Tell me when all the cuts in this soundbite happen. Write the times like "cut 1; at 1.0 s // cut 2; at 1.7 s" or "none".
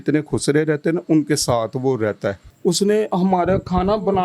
cut 1; at 2.5 s